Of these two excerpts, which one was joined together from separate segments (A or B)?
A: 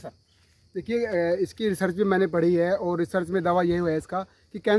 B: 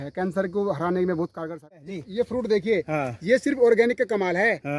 B